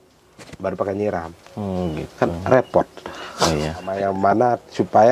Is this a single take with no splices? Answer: no; 1 cut; at 3.9 s

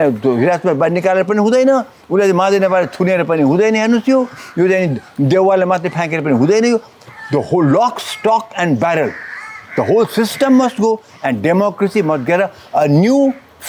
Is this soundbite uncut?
yes; 0 cuts

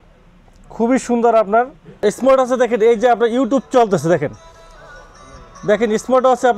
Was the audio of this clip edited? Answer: yes; 1 cut; at 2.1 s

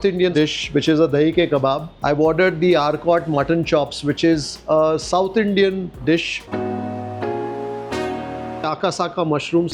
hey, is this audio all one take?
yes; 0 cuts

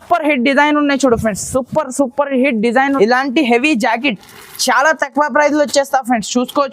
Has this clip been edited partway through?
yes; 1 cut; at 3.0 s

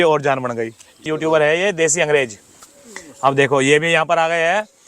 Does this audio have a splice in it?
yes; 1 cut; at 1.0 s

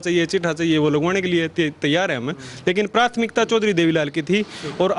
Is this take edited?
no; 0 cuts

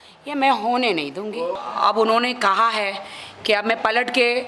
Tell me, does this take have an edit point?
yes; 1 cut; at 1.6 s

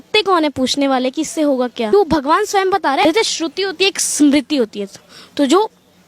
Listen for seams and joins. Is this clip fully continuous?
no; 2 cuts; at 1.9 s, 3.0 s

